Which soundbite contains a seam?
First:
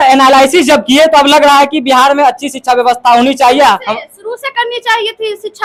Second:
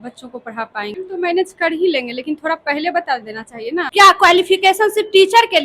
second; 2 cuts; at 0.9 s, 3.9 s

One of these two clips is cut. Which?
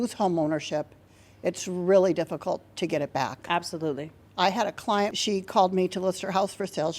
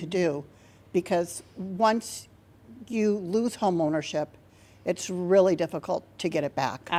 first; 1 cut; at 5.1 s

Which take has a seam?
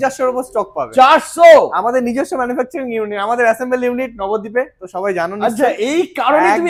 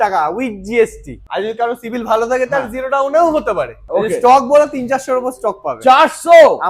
second; 2 cuts; at 1.2 s, 3.8 s

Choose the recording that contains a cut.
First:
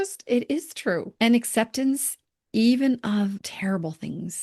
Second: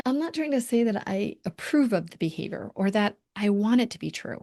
first; 2 cuts; at 1.1 s, 3.5 s

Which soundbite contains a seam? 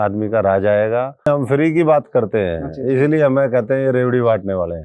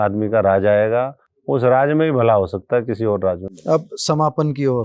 first; 1 cut; at 1.3 s

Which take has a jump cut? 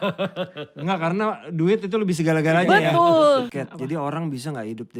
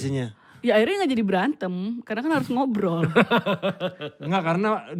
first; 1 cut; at 3.6 s

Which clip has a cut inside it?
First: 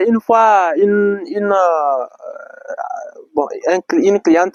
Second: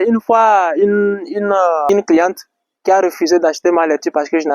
second; 1 cut; at 1.9 s

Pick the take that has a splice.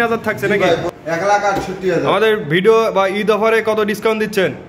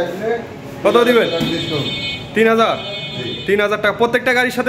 first; 1 cut; at 1.0 s

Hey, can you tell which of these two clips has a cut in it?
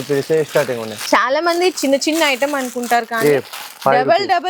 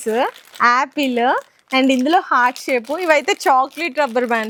first; 1 cut; at 0.9 s

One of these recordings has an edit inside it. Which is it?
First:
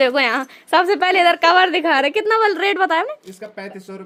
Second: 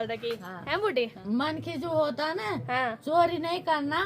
second; 1 cut; at 1.2 s

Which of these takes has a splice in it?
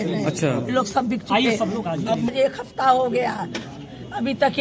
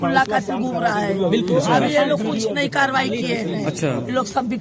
first; 1 cut; at 2.3 s

